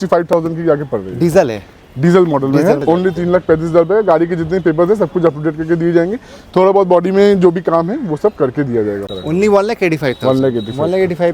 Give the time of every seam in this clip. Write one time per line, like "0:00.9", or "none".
0:02.8
0:09.0